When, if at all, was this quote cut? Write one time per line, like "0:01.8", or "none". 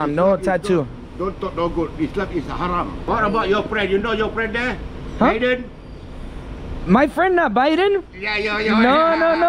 0:03.0